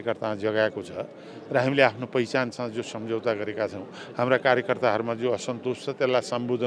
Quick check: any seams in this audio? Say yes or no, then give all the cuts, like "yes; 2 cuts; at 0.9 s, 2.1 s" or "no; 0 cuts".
no; 0 cuts